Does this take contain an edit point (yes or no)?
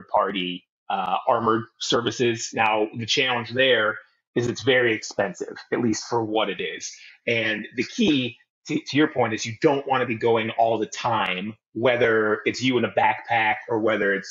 no